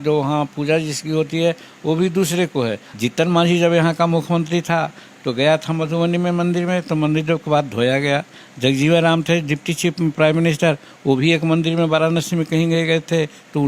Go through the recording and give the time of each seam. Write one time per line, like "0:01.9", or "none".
0:02.9